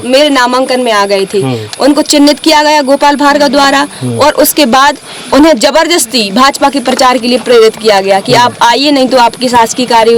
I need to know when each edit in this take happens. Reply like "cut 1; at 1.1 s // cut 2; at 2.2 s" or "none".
none

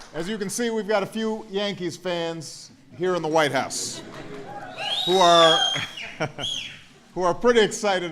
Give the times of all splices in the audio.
cut 1; at 3.9 s

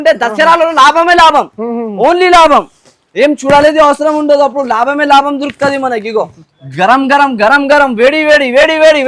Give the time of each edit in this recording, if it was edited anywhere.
cut 1; at 6.4 s

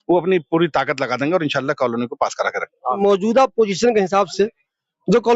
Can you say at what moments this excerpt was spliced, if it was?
cut 1; at 3.0 s

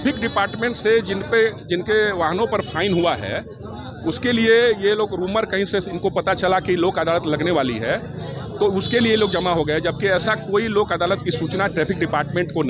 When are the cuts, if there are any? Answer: none

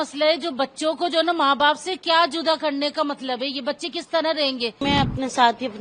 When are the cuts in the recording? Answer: cut 1; at 4.8 s

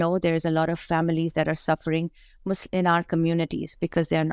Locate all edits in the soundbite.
none

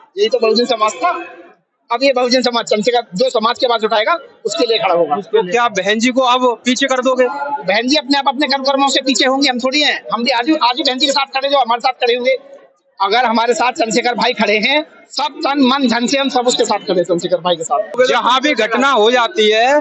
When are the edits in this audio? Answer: cut 1; at 18.0 s

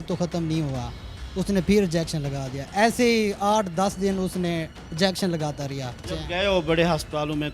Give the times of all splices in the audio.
cut 1; at 6.2 s

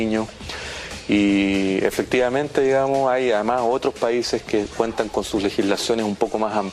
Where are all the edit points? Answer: none

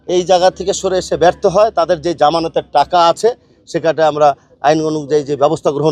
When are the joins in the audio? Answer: none

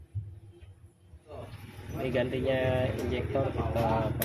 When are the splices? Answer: cut 1; at 1.5 s

